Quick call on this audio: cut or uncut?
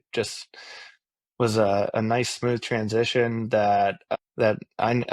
cut